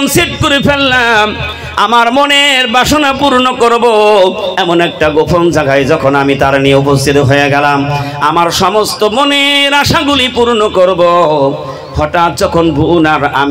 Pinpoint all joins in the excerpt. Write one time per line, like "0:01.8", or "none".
none